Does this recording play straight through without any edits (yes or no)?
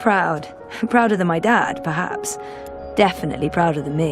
yes